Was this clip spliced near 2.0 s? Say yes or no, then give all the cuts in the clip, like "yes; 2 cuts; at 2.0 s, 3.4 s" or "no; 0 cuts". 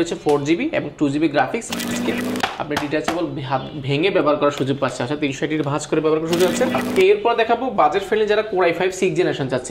yes; 2 cuts; at 2.0 s, 6.8 s